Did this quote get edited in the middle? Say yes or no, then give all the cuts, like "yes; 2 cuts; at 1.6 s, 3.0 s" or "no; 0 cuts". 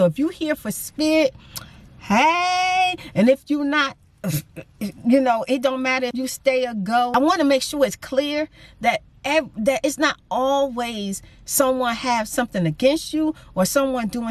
no; 0 cuts